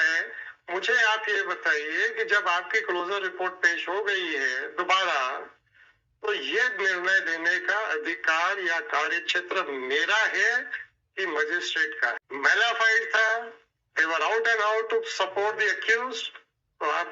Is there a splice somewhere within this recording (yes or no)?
yes